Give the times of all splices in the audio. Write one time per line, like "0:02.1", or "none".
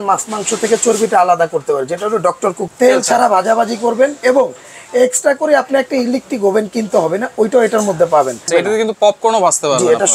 0:02.6
0:08.5